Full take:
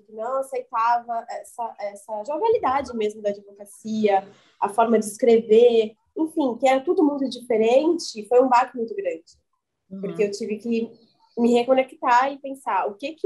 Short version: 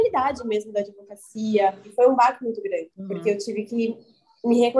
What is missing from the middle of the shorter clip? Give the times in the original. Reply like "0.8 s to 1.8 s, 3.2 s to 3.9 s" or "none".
4.3 s to 8.2 s, 9.3 s to 9.9 s